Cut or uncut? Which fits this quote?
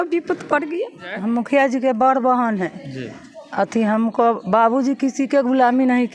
cut